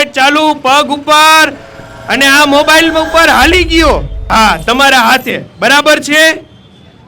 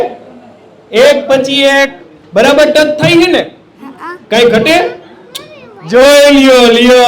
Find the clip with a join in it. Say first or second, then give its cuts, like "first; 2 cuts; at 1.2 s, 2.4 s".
first; 1 cut; at 4.1 s